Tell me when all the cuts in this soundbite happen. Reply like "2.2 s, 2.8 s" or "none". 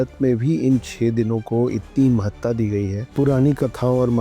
3.0 s

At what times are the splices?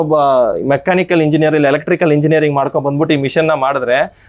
none

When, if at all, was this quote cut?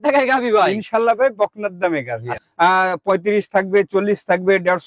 2.4 s

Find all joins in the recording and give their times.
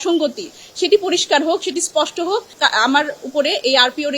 2.5 s

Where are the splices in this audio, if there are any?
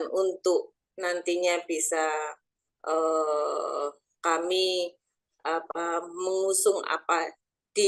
none

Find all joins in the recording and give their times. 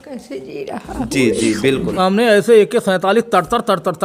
2.0 s

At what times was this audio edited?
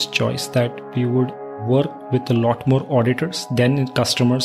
1.5 s

